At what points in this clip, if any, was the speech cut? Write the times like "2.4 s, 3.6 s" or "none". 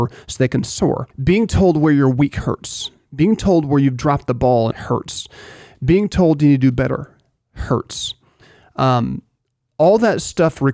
1.1 s, 4.7 s